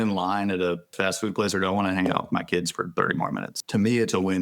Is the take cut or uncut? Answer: cut